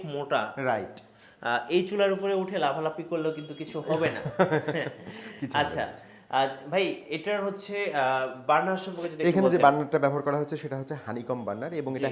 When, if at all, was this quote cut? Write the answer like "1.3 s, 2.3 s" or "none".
none

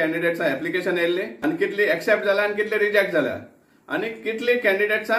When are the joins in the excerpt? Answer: 1.3 s

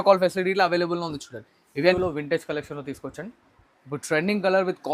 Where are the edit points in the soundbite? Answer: 1.9 s

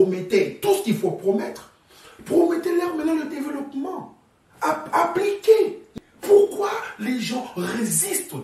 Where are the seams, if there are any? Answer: 5.8 s

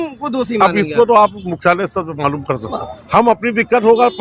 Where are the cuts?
2.8 s

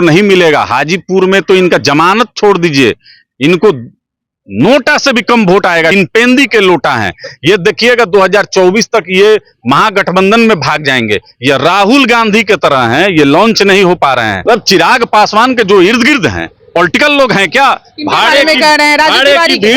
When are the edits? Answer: 5.9 s, 14.3 s

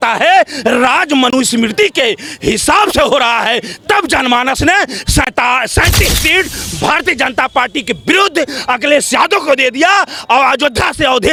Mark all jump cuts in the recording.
none

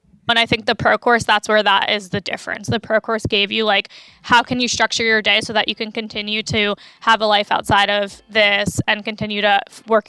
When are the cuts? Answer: 8.2 s

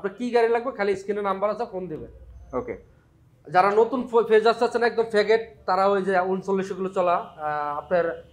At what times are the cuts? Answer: none

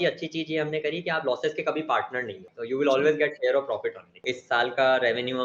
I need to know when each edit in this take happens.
2.5 s, 4.3 s

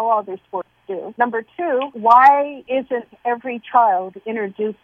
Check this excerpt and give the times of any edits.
1.1 s, 1.9 s, 2.6 s

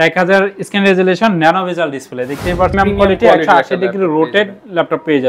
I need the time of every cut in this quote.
2.7 s

